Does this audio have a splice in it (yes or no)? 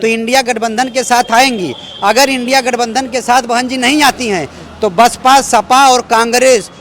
no